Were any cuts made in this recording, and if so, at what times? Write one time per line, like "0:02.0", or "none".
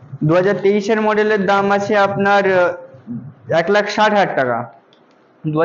none